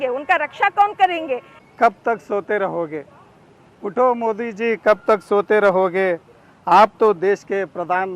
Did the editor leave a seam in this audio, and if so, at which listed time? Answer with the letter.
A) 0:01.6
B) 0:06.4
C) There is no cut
A